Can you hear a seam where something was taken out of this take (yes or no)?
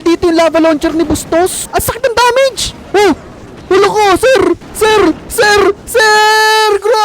yes